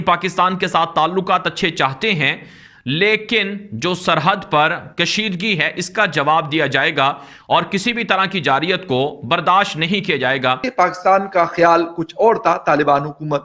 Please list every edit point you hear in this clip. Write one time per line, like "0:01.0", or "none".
0:10.6